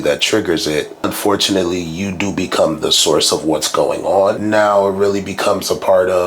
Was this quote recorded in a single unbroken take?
no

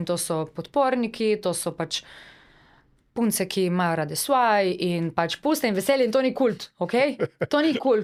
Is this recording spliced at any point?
no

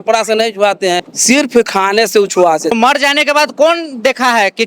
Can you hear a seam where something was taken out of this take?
yes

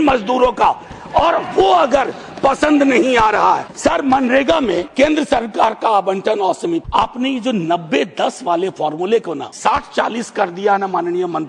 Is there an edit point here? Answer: yes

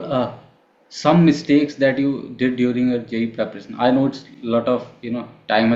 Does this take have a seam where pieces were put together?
no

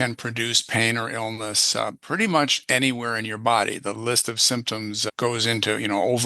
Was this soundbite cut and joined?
yes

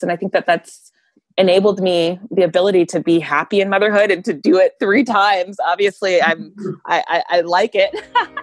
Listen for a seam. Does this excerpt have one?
no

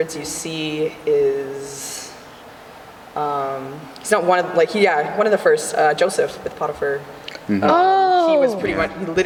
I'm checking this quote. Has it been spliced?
no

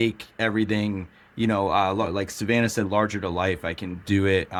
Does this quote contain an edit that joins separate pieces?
no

